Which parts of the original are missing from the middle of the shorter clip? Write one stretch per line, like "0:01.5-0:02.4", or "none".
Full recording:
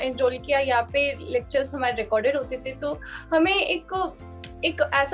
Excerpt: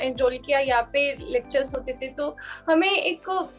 0:01.8-0:02.4